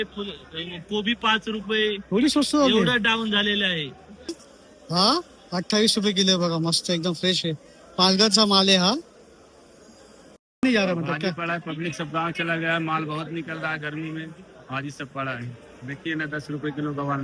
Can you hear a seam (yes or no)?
yes